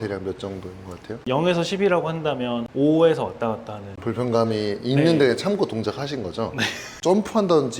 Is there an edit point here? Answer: yes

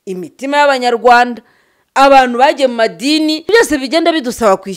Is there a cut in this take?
yes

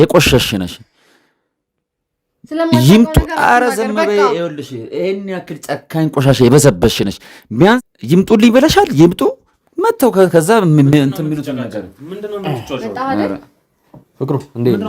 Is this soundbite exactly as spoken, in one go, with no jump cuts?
no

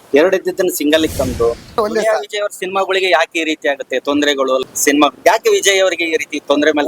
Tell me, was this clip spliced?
yes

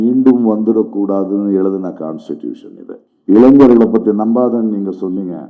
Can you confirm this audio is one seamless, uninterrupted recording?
no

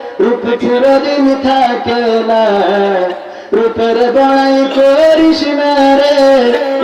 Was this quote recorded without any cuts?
yes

